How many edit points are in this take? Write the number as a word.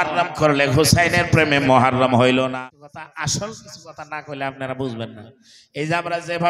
one